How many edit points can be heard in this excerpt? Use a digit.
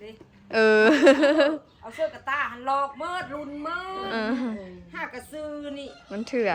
0